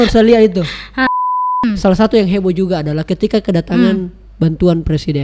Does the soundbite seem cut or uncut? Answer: cut